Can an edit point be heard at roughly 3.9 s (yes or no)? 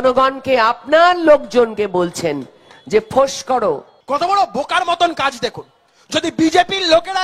yes